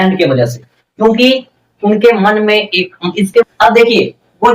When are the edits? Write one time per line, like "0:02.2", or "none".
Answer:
0:03.5